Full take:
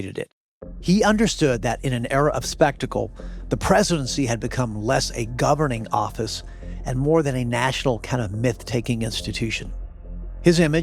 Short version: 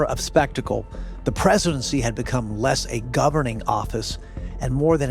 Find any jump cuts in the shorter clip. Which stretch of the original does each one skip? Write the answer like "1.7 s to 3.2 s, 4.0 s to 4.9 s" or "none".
none